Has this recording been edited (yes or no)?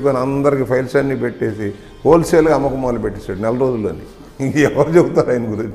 no